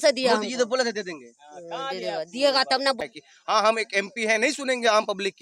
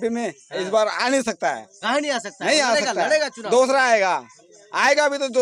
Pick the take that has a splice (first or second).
first